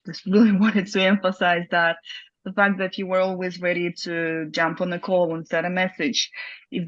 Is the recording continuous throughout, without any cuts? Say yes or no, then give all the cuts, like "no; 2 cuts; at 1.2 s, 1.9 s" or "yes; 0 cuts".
yes; 0 cuts